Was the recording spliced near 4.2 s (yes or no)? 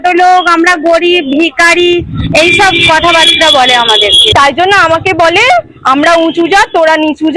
yes